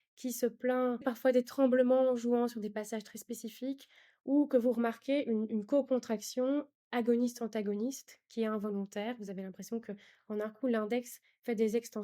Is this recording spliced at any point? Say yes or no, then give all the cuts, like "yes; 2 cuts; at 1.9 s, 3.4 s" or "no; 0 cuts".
yes; 1 cut; at 1.0 s